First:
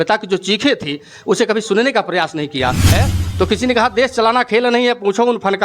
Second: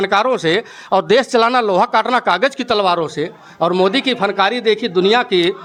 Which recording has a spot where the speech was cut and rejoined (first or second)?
first